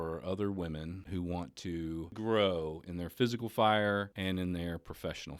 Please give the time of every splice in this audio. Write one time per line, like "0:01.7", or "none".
0:01.0
0:02.1
0:04.1

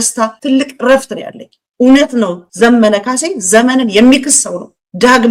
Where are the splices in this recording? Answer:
none

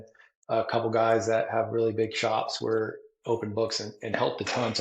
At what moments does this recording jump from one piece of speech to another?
none

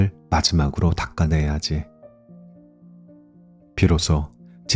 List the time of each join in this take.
0:01.9
0:03.3

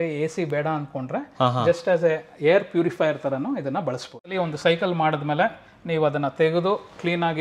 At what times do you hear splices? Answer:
0:04.3

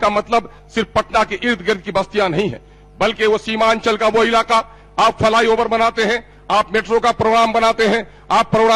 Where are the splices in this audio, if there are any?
none

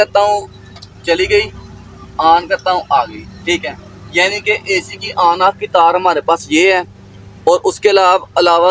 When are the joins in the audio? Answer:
none

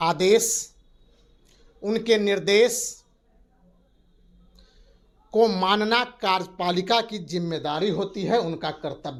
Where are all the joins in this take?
none

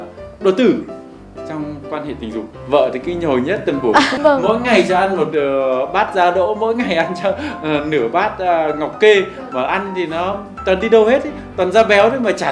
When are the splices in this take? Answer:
0:02.6
0:04.1

